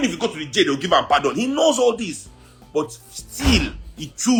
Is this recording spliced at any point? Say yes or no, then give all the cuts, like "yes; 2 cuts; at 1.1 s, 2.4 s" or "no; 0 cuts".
no; 0 cuts